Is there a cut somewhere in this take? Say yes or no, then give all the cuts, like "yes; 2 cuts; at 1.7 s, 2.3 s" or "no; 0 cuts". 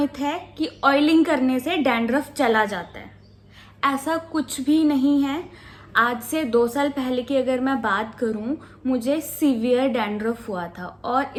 no; 0 cuts